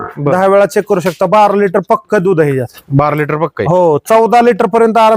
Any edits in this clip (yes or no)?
no